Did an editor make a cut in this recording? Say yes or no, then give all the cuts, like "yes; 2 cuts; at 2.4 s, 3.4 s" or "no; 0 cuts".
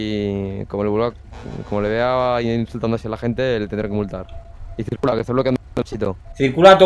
yes; 1 cut; at 4.3 s